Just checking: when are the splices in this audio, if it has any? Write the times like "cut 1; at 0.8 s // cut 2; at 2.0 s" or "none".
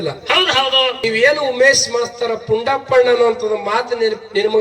cut 1; at 1.0 s